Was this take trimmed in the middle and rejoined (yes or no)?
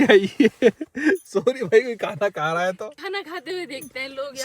yes